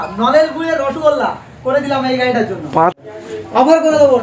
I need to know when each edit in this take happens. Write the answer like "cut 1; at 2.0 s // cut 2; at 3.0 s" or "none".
cut 1; at 3.0 s